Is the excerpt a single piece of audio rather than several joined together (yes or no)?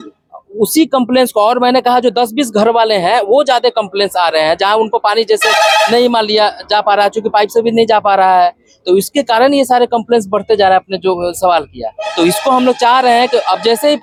yes